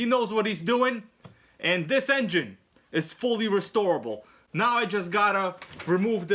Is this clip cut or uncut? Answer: uncut